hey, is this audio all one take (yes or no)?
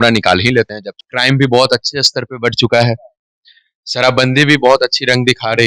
no